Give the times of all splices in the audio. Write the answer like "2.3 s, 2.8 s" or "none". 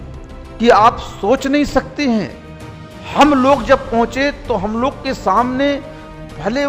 none